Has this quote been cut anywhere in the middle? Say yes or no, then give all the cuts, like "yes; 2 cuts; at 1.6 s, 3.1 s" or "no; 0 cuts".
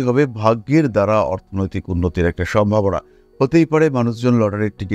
no; 0 cuts